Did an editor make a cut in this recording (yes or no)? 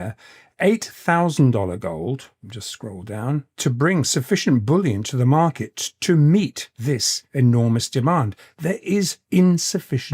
yes